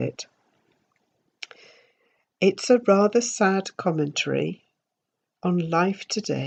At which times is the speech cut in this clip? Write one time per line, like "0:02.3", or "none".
none